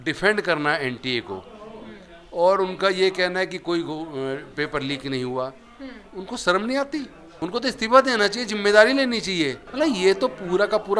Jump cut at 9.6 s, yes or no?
yes